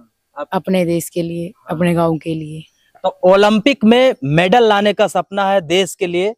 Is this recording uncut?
yes; 0 cuts

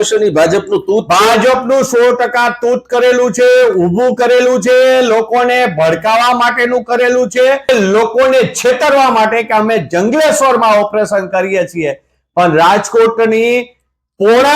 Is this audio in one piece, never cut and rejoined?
no; 1 cut; at 7.7 s

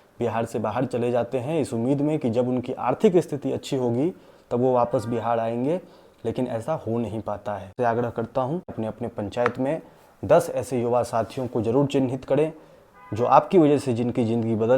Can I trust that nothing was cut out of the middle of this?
no; 2 cuts; at 7.7 s, 8.7 s

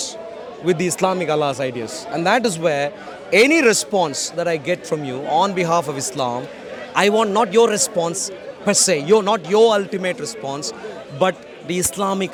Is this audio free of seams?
yes; 0 cuts

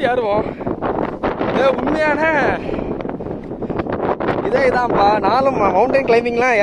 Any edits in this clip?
no; 0 cuts

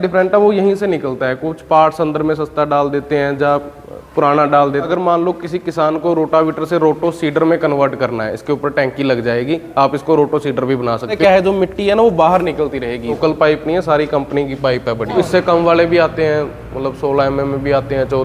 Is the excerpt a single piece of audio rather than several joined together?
no; 4 cuts; at 4.9 s, 11.1 s, 13.2 s, 15.1 s

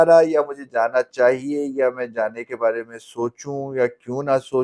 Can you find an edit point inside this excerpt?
no; 0 cuts

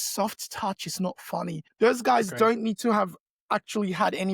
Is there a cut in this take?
yes; 1 cut; at 1.6 s

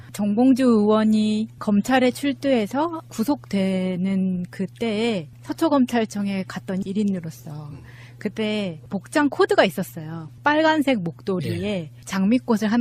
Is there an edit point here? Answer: no; 0 cuts

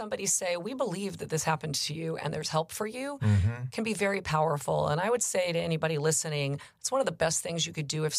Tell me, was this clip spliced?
no; 0 cuts

